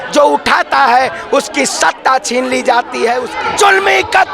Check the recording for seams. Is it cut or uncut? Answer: cut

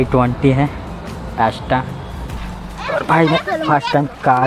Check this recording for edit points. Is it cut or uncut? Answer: cut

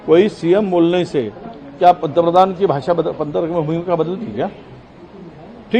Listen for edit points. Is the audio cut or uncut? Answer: uncut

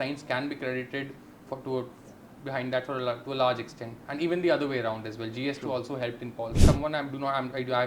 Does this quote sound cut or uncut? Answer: cut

